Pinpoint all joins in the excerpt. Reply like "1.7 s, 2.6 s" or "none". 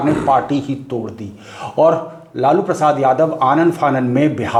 none